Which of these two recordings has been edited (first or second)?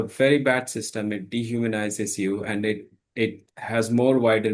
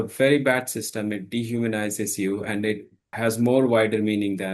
second